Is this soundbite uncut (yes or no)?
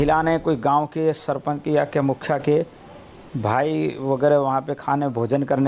yes